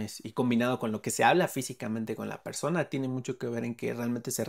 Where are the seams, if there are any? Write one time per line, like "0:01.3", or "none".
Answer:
none